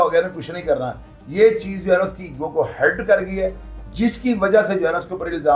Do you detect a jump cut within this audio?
no; 0 cuts

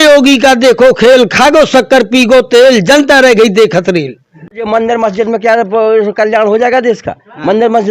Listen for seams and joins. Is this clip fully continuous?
no; 1 cut; at 4.6 s

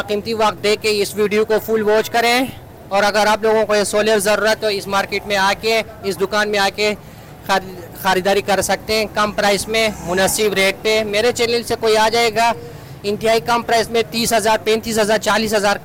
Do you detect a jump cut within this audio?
no; 0 cuts

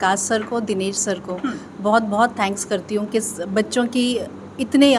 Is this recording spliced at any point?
no; 0 cuts

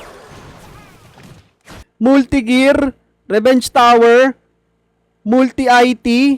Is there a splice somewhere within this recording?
yes; 1 cut; at 1.9 s

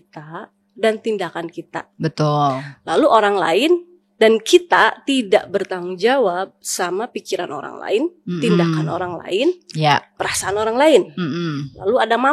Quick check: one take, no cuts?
yes; 0 cuts

